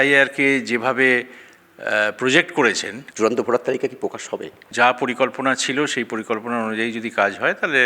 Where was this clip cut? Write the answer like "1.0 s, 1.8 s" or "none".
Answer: 3.0 s, 4.6 s